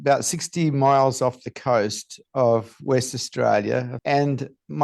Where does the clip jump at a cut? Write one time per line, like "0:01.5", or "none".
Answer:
0:03.9